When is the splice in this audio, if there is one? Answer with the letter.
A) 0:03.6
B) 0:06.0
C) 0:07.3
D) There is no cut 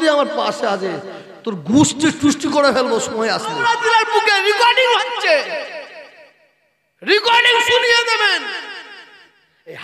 A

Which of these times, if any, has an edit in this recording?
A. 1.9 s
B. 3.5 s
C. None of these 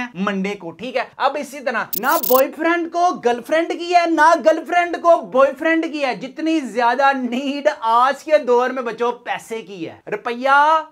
A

